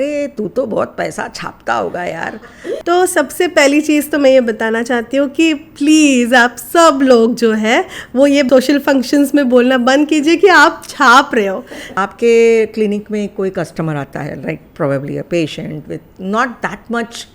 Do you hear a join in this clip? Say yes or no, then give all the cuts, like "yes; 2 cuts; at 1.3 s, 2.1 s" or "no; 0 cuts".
yes; 3 cuts; at 2.2 s, 8.5 s, 11.9 s